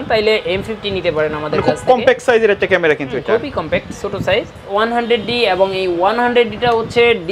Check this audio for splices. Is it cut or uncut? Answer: cut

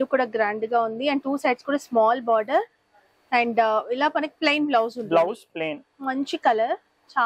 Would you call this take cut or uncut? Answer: uncut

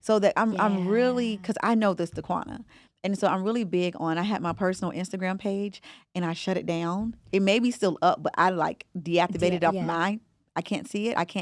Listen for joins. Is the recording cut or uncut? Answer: uncut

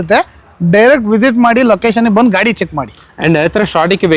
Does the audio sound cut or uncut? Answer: uncut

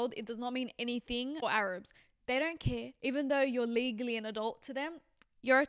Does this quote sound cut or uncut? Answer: cut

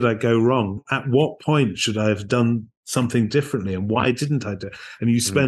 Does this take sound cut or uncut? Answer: uncut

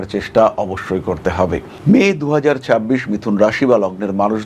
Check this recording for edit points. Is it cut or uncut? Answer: cut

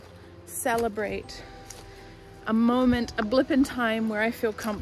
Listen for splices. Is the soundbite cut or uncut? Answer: uncut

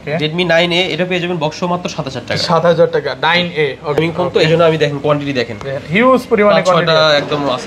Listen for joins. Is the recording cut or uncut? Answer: cut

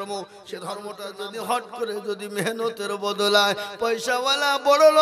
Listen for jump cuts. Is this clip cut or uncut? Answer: cut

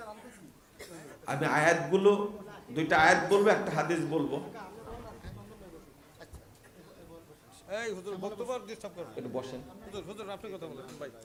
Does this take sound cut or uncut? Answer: uncut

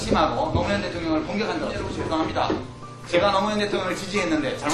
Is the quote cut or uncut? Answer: cut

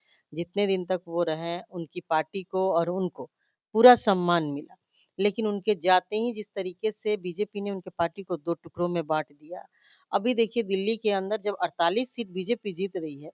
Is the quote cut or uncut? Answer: uncut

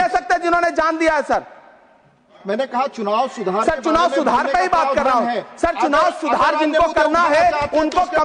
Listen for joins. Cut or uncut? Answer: uncut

